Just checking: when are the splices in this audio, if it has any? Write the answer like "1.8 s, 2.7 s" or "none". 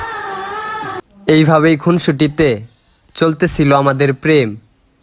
1.0 s